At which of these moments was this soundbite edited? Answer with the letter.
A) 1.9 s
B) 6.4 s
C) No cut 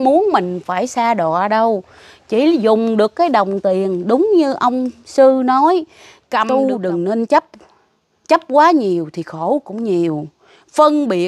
B